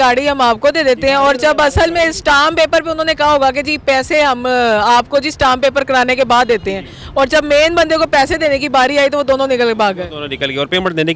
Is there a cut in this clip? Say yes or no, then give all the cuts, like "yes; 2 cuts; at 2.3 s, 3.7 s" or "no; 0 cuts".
no; 0 cuts